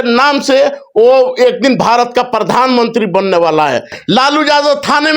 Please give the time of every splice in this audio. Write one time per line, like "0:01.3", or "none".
0:04.0